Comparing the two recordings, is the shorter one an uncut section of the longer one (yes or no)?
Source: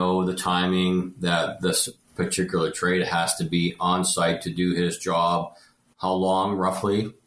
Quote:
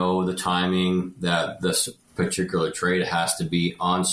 yes